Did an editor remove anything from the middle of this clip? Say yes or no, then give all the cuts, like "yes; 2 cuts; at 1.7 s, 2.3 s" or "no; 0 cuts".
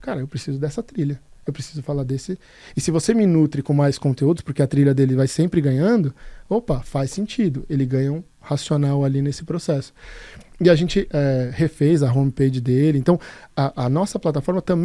no; 0 cuts